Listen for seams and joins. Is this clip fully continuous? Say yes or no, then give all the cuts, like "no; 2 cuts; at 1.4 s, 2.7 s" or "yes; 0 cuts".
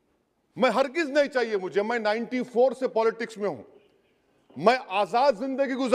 yes; 0 cuts